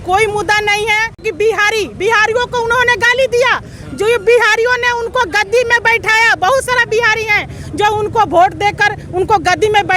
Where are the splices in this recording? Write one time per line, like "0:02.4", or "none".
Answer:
0:01.2